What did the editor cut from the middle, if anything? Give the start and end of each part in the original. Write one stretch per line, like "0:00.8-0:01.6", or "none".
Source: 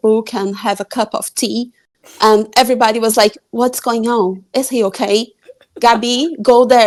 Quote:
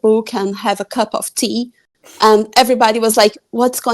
none